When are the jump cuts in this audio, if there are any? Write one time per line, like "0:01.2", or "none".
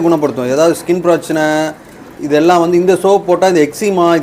none